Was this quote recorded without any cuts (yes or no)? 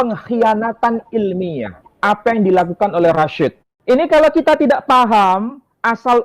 no